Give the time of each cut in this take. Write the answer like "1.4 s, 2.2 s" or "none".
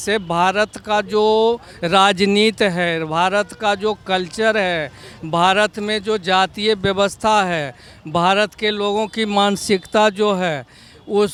none